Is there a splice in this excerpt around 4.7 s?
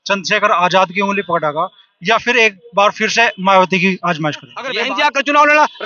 yes; 1 cut; at 4.7 s

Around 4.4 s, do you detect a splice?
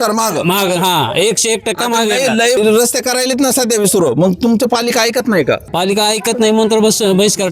no; 2 cuts; at 2.6 s, 5.7 s

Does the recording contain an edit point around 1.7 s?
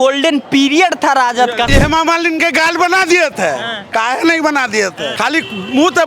yes; 2 cuts; at 1.7 s, 5.1 s

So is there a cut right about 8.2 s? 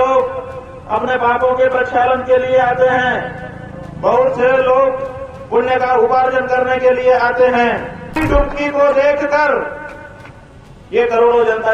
yes; 1 cut; at 8.2 s

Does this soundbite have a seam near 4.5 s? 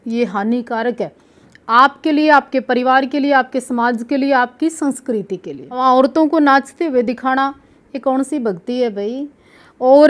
no; 1 cut; at 5.8 s

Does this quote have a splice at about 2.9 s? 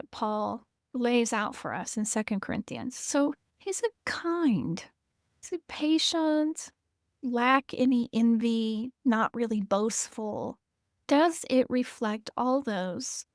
no; 0 cuts

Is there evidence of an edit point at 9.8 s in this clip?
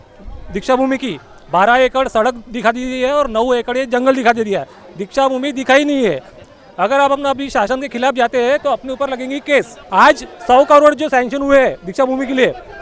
yes; 1 cut; at 9.8 s

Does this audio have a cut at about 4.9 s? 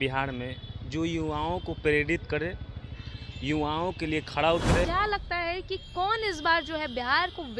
yes; 1 cut; at 4.9 s

